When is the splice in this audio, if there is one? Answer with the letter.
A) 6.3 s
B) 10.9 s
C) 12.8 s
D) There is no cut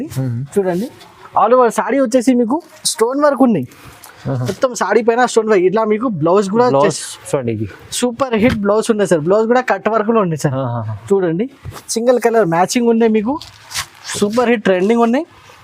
D